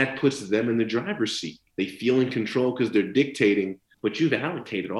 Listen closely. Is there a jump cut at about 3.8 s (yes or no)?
yes